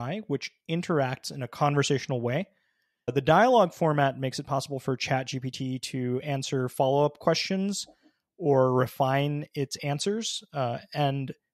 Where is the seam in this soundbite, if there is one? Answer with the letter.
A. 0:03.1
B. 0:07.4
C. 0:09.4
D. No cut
A